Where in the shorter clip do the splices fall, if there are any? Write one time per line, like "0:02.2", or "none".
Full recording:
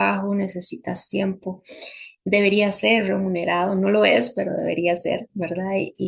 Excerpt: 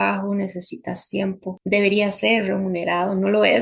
0:01.5